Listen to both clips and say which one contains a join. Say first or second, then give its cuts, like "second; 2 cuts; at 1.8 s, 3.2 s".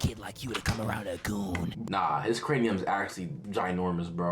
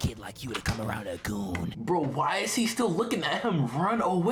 first; 1 cut; at 1.8 s